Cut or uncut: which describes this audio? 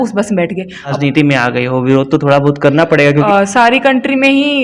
cut